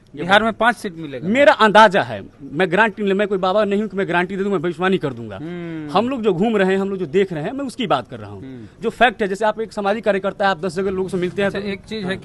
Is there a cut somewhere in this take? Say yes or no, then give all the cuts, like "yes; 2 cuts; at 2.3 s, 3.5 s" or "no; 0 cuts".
no; 0 cuts